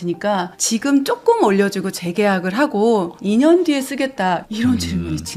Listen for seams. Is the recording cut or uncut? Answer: uncut